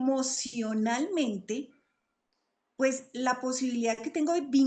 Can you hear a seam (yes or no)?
no